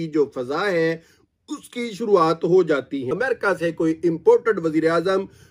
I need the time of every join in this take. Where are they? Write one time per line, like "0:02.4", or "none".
0:03.1